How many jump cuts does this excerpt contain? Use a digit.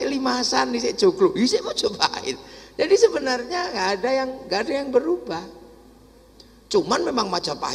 0